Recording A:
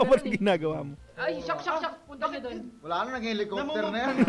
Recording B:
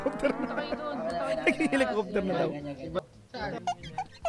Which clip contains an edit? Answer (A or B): B